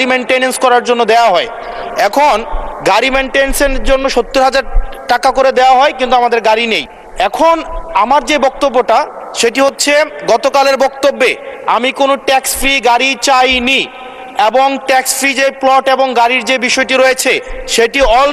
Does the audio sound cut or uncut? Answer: uncut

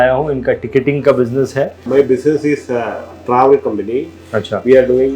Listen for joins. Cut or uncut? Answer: cut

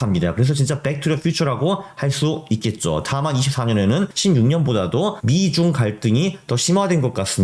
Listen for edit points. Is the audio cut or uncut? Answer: cut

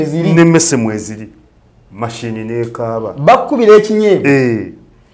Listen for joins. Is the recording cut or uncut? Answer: uncut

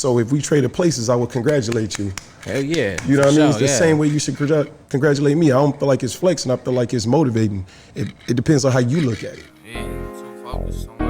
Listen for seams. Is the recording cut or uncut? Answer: cut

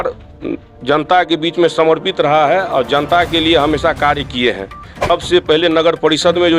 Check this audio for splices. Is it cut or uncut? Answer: cut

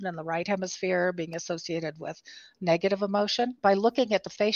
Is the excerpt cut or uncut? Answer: cut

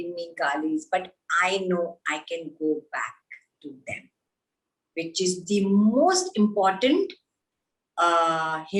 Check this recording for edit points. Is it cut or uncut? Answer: uncut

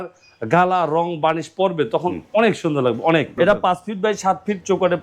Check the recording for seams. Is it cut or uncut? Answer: cut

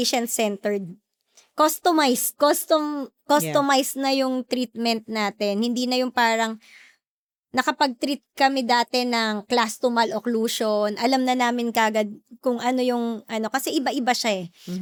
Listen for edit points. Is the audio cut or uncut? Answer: uncut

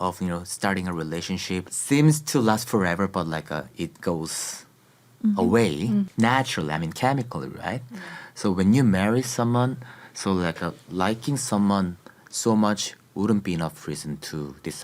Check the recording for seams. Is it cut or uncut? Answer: cut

